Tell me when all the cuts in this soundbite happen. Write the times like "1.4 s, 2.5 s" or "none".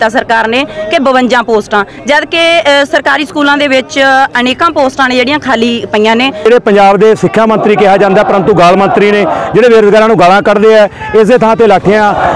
6.4 s